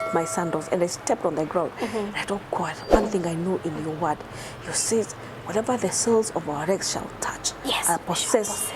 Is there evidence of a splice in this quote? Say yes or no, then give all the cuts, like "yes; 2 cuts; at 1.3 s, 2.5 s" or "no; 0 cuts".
no; 0 cuts